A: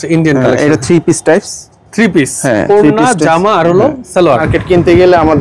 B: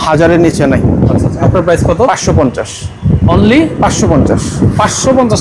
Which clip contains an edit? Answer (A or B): A